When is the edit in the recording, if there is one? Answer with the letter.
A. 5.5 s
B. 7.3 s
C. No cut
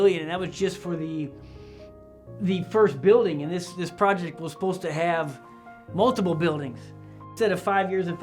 B